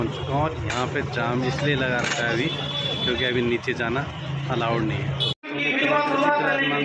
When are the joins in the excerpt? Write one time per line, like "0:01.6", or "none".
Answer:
0:05.4